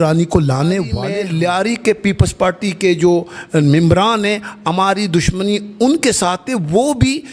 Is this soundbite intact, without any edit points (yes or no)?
no